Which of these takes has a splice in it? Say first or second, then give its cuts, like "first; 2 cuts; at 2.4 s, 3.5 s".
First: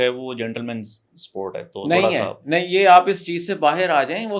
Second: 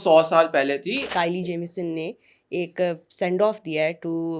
second; 1 cut; at 1.0 s